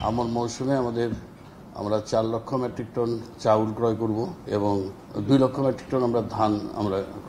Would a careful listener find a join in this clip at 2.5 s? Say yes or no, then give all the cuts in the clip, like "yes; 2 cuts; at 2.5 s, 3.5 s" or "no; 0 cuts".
no; 1 cut; at 4.4 s